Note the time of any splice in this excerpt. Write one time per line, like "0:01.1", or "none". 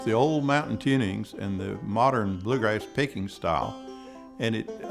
none